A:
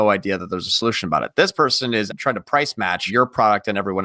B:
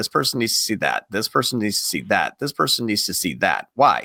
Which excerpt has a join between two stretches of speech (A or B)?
A